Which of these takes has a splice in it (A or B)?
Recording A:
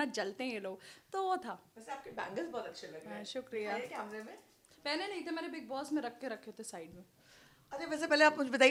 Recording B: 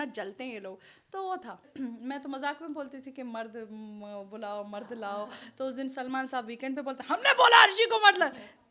B